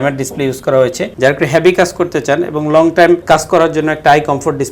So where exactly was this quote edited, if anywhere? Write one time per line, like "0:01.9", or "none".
0:01.0
0:03.2

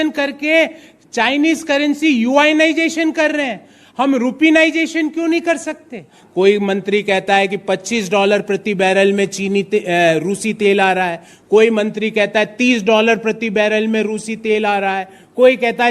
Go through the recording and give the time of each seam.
0:06.2

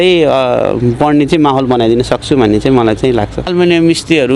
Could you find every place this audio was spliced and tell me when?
0:03.5

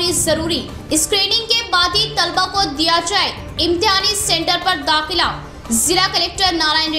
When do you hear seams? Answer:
none

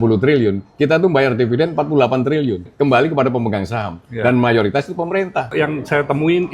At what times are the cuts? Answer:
0:05.5

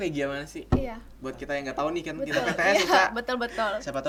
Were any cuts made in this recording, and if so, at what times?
none

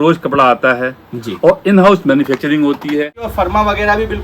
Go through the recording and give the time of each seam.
0:03.2

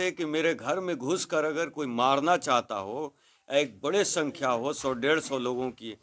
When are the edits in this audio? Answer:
none

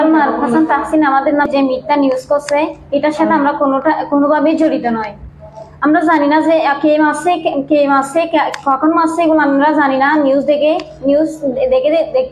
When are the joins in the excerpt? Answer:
0:01.5

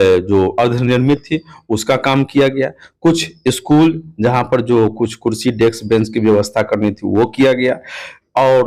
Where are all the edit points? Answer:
none

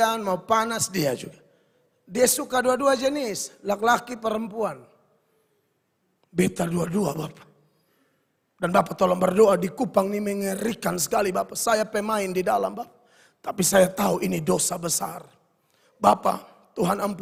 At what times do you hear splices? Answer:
none

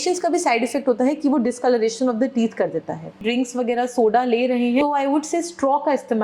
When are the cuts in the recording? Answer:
0:03.2
0:04.8

